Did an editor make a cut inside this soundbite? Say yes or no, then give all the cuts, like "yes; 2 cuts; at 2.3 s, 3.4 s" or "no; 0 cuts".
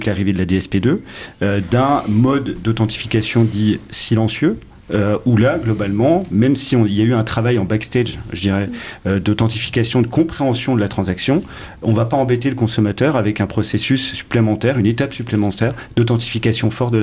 no; 0 cuts